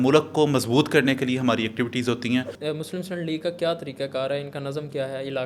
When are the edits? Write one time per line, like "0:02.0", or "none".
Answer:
0:02.5